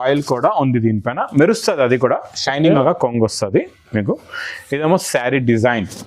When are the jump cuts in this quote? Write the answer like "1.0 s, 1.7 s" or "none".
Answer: 2.8 s